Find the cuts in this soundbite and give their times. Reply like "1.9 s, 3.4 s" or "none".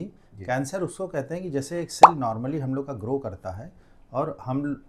none